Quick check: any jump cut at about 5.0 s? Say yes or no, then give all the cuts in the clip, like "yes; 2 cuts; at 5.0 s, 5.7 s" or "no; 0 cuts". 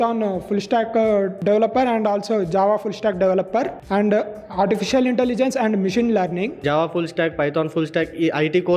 no; 3 cuts; at 1.3 s, 3.8 s, 6.5 s